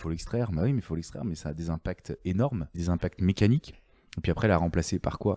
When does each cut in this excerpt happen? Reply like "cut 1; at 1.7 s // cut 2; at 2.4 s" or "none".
cut 1; at 2.8 s